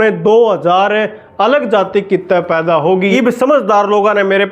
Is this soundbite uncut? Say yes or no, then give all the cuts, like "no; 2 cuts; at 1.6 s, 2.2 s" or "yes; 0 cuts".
no; 1 cut; at 3.1 s